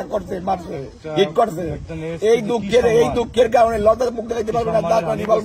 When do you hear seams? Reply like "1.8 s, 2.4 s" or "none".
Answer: none